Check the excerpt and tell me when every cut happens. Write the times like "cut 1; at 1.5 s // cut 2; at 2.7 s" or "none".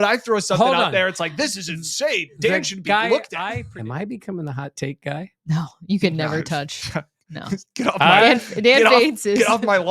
cut 1; at 3.6 s